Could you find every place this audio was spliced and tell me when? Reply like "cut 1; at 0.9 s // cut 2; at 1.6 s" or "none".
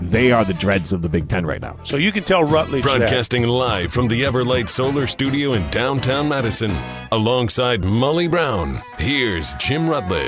cut 1; at 3.0 s